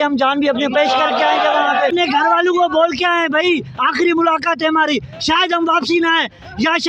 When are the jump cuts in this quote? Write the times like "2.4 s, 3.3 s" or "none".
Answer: 1.9 s